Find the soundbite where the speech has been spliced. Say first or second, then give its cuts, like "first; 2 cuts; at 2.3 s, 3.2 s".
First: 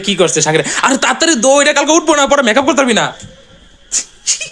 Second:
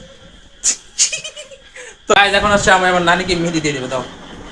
second; 1 cut; at 2.1 s